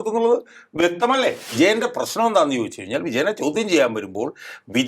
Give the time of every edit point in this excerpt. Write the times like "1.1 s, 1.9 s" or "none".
1.5 s